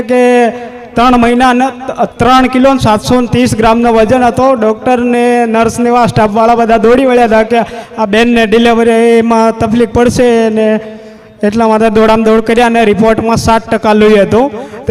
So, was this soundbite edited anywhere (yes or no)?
no